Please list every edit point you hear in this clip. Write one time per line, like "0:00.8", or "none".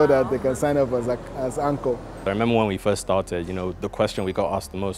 0:02.2